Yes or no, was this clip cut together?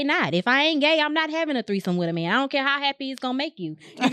no